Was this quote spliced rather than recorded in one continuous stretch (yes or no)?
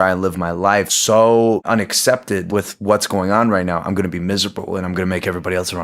yes